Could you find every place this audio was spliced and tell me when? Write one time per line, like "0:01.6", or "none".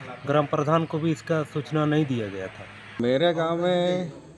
0:03.0